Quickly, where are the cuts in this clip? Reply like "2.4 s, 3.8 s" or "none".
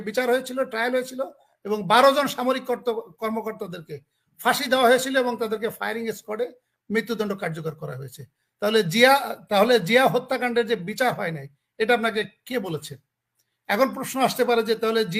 none